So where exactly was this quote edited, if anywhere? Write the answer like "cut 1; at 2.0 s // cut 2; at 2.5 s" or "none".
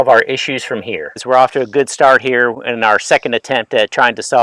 none

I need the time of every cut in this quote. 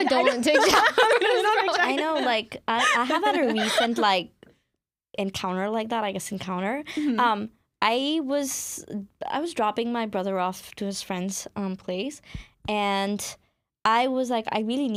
none

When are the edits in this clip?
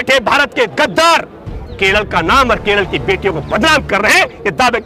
none

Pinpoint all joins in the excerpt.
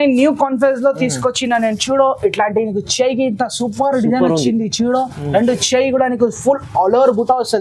none

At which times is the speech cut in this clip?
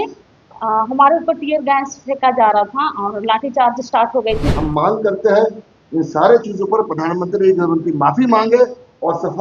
cut 1; at 4.5 s

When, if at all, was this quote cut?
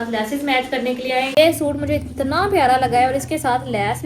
cut 1; at 1.4 s

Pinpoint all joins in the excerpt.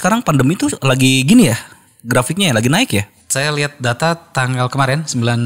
none

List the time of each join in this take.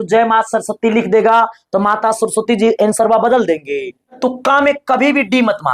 cut 1; at 4.1 s

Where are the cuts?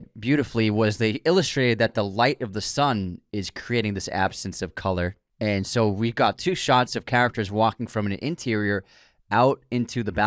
cut 1; at 5.2 s

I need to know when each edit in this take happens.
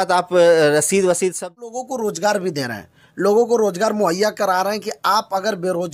cut 1; at 1.5 s

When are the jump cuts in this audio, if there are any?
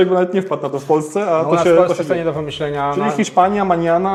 none

